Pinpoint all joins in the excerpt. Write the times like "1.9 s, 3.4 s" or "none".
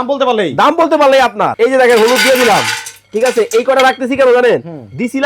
1.5 s